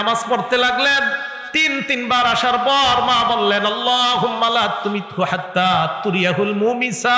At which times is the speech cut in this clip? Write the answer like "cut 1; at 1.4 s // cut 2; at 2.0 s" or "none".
none